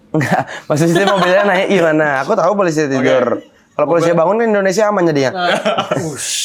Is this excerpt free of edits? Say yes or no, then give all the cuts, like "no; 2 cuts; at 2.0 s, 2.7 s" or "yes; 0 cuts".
yes; 0 cuts